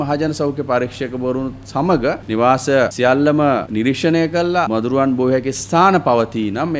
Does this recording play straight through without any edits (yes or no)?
no